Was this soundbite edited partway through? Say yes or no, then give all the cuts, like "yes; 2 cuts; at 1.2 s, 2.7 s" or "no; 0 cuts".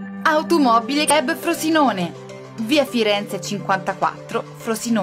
yes; 1 cut; at 1.1 s